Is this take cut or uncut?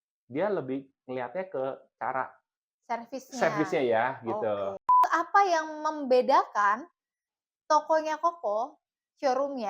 cut